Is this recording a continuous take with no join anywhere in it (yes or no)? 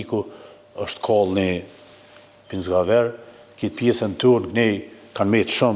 yes